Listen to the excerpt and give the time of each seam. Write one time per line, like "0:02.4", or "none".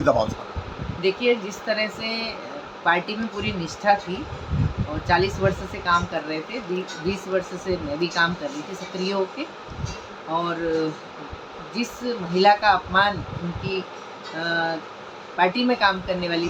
none